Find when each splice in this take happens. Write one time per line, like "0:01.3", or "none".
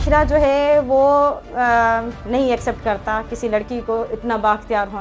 none

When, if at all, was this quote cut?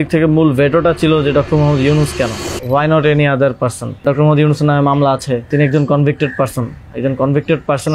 0:02.5
0:04.0
0:05.5

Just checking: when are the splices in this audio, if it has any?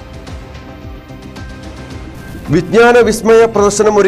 none

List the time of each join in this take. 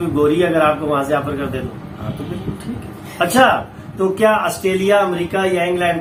none

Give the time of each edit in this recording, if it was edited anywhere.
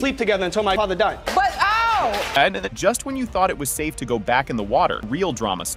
none

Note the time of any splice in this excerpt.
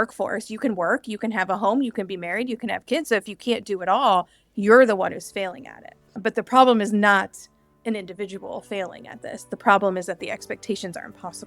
none

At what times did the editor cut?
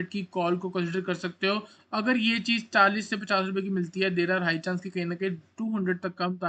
none

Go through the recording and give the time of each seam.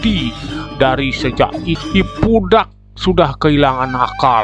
0:01.7

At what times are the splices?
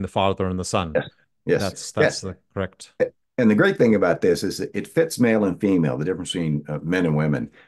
none

